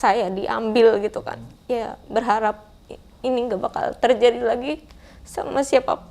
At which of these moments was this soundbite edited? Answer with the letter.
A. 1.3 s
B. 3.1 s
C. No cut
A